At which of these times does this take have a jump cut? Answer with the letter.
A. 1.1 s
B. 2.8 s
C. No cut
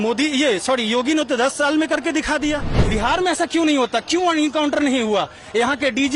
B